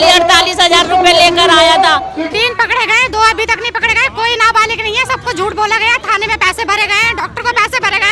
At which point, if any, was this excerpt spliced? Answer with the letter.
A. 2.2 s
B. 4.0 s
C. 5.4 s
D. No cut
A